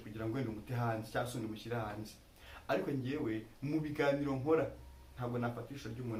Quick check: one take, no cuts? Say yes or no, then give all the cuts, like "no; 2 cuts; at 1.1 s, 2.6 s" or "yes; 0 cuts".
yes; 0 cuts